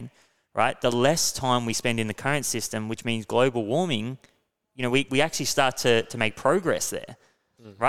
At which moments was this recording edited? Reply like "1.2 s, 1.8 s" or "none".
none